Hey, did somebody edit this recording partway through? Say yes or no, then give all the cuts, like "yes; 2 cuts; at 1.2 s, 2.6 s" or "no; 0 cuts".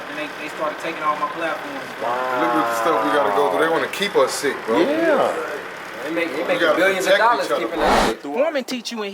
yes; 1 cut; at 8.1 s